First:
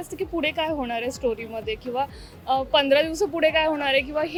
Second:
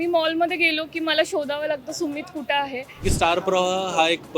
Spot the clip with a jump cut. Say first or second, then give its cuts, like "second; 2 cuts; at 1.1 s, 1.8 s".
second; 1 cut; at 3.1 s